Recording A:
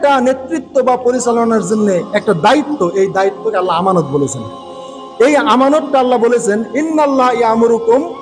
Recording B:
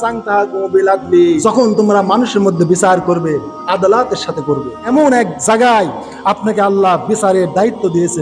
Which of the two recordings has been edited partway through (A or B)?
B